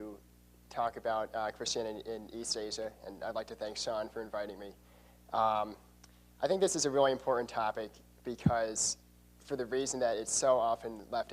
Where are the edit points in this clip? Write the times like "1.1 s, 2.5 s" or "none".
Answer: 5.9 s